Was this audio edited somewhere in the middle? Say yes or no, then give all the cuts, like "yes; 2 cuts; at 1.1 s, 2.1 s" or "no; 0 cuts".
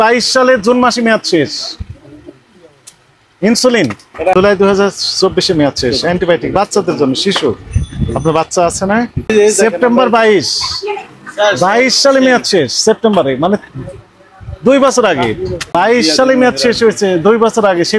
yes; 3 cuts; at 4.3 s, 9.3 s, 15.6 s